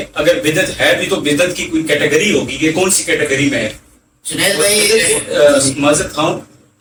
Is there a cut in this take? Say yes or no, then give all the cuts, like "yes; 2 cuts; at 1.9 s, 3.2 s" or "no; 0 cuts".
no; 0 cuts